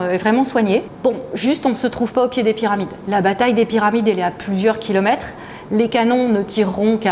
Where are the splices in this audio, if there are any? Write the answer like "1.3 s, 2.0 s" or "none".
0.9 s